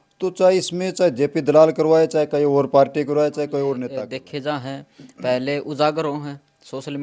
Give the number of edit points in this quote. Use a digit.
1